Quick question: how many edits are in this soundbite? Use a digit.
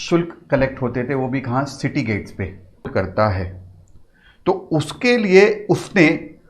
1